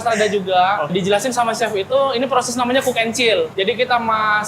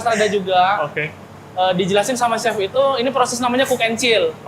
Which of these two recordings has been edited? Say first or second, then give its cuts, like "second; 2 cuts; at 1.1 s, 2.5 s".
first; 2 cuts; at 0.9 s, 3.5 s